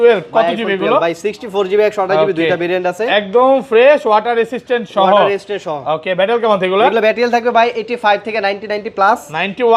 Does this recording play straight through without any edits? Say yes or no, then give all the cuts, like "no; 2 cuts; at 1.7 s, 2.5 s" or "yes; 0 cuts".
yes; 0 cuts